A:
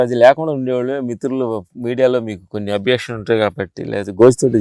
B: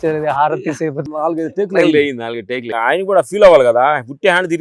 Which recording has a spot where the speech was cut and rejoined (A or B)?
B